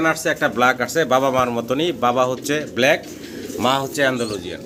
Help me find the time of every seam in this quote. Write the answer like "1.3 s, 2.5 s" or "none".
none